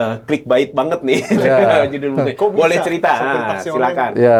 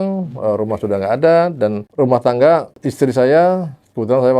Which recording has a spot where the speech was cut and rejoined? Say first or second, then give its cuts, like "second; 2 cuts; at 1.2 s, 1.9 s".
second; 2 cuts; at 1.8 s, 2.8 s